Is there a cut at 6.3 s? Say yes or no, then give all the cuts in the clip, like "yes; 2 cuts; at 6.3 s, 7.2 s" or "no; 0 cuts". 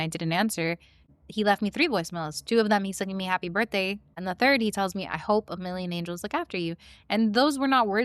no; 2 cuts; at 1.1 s, 4.2 s